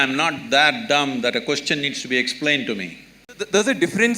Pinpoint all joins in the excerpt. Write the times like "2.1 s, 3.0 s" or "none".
3.2 s